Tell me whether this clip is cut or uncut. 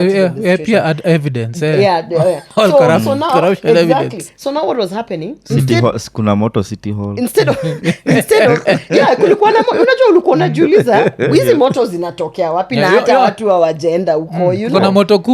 uncut